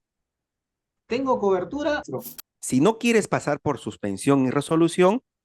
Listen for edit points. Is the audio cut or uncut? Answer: cut